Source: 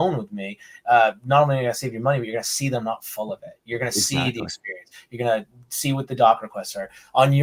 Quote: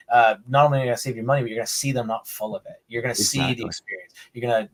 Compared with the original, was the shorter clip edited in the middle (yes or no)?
no